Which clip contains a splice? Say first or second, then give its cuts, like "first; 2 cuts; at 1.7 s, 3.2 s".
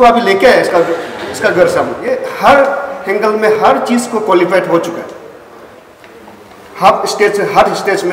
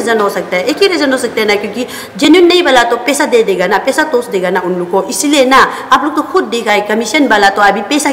first; 1 cut; at 2.0 s